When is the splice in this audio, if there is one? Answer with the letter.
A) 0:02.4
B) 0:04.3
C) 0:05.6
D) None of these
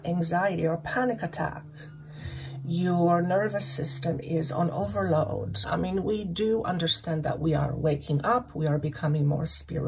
C